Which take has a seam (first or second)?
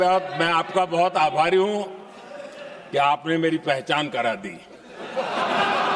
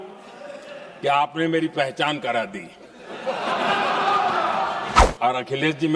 second